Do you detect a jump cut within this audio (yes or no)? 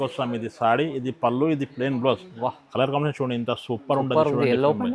no